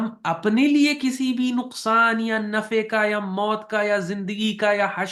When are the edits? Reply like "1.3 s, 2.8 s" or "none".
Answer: none